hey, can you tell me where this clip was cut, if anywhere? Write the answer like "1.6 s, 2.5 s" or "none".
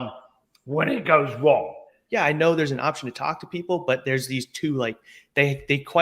1.9 s

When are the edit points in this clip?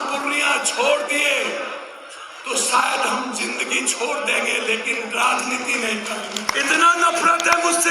6.5 s

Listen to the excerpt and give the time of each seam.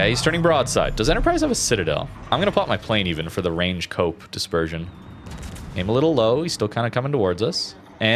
none

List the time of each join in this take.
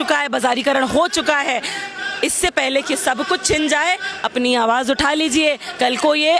none

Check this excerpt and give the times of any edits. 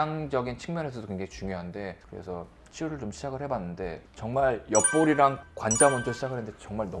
2.0 s

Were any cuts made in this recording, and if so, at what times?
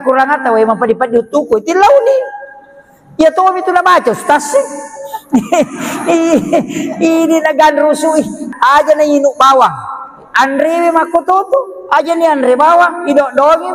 8.4 s

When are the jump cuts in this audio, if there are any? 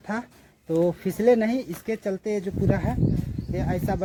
none

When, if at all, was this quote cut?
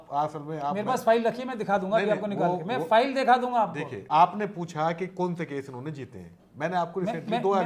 4.0 s

